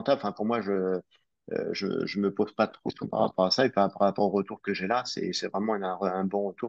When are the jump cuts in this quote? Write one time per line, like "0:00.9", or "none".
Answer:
none